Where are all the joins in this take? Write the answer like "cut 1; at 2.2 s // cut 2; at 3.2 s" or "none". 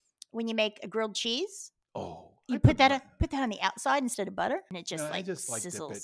cut 1; at 4.7 s